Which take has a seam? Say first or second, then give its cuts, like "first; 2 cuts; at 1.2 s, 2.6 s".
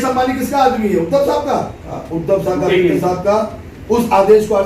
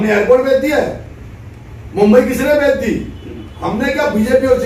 first; 1 cut; at 2.1 s